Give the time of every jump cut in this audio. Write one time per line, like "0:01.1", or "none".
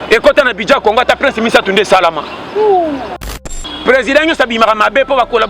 0:03.5